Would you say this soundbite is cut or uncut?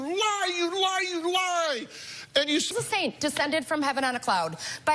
cut